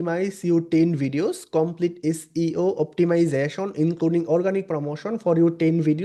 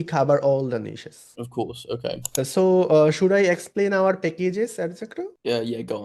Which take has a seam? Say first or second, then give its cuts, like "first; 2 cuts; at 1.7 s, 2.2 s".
second; 1 cut; at 2.2 s